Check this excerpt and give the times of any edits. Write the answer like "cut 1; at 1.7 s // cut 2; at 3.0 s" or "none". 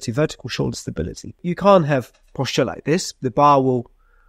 cut 1; at 1.4 s

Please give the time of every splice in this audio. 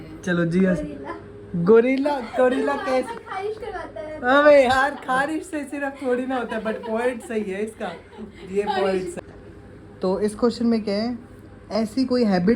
cut 1; at 9.1 s

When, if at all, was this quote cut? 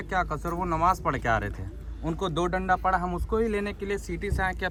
none

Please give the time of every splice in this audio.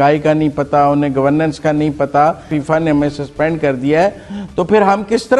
cut 1; at 2.5 s

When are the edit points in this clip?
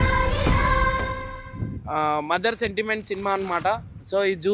cut 1; at 1.3 s

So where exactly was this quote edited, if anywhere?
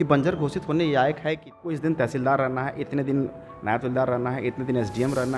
cut 1; at 1.8 s

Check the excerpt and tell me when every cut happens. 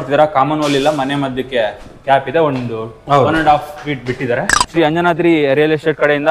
cut 1; at 4.6 s

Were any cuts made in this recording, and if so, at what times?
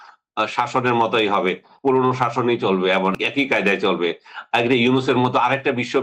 cut 1; at 1.7 s // cut 2; at 3.2 s

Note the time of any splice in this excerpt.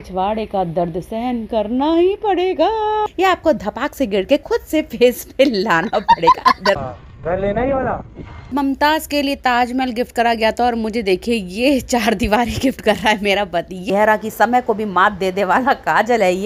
cut 1; at 3.1 s // cut 2; at 6.8 s // cut 3; at 8.5 s // cut 4; at 13.9 s

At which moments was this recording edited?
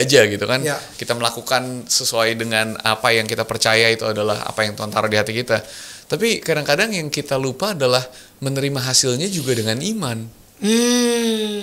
none

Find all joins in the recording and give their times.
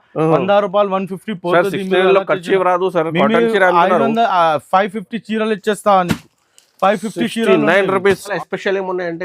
cut 1; at 8.3 s

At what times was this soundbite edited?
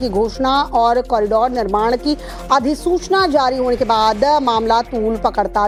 none

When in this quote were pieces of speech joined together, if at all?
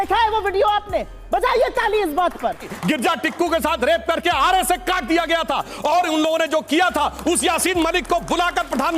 cut 1; at 2.7 s

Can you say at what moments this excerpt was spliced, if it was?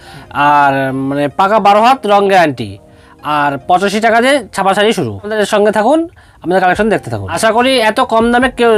cut 1; at 5.3 s // cut 2; at 7.2 s

